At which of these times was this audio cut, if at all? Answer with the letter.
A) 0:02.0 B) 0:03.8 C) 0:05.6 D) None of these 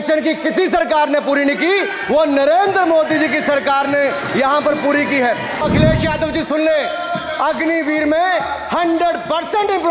C